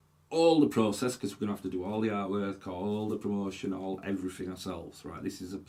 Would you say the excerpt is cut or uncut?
uncut